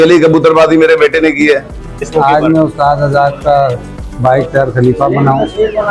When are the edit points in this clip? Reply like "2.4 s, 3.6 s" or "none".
1.9 s